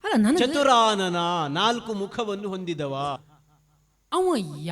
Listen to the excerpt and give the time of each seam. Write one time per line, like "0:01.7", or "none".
0:03.3

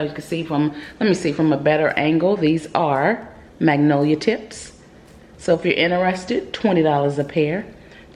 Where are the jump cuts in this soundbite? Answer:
none

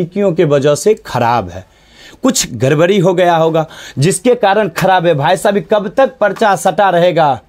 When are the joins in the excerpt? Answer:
none

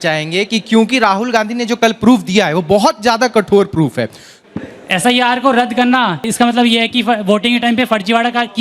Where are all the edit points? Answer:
0:04.4
0:06.2

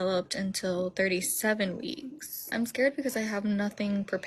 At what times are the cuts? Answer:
0:02.5

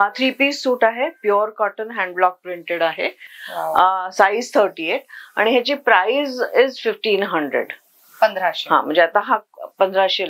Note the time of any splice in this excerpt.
none

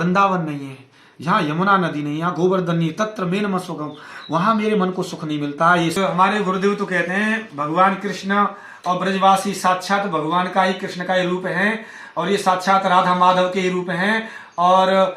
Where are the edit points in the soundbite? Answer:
0:06.0

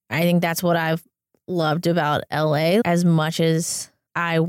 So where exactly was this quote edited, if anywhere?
0:02.8

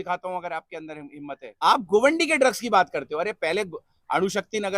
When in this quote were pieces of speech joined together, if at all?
0:01.4

